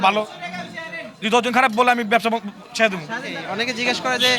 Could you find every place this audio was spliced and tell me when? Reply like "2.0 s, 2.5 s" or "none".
3.4 s